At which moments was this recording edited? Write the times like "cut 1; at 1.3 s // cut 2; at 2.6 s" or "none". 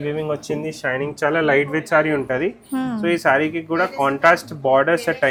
none